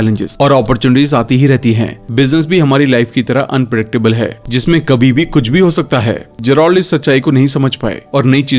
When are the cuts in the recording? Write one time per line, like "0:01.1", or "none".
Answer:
none